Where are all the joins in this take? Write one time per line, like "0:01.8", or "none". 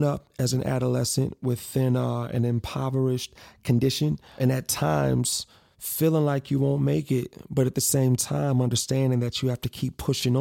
0:04.3